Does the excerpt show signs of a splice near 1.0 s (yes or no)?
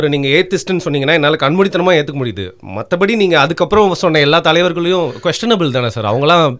no